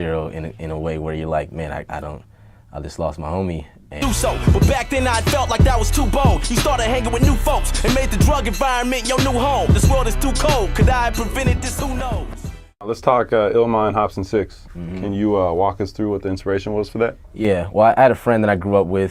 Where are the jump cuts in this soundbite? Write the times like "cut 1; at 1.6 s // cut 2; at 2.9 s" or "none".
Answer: none